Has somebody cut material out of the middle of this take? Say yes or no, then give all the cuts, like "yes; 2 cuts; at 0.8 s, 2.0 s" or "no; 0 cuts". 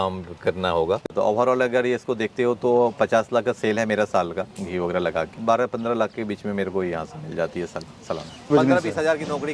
yes; 3 cuts; at 1.0 s, 5.4 s, 8.5 s